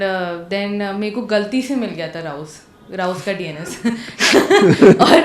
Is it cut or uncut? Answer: uncut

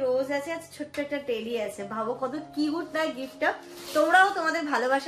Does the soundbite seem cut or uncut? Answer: uncut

